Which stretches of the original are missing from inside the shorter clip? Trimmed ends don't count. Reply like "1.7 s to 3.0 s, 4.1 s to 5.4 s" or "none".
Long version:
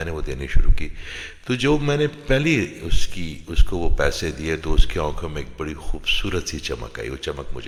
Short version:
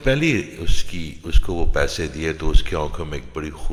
none